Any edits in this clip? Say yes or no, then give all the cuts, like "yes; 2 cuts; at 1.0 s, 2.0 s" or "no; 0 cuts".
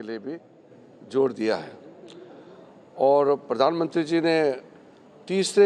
yes; 1 cut; at 3.6 s